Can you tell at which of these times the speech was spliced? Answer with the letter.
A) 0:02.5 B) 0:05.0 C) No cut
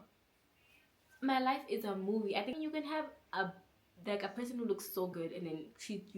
A